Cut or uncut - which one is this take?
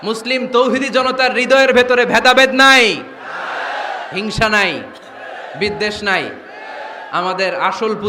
uncut